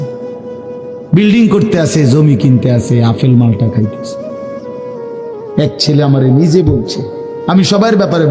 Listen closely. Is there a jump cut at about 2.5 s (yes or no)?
no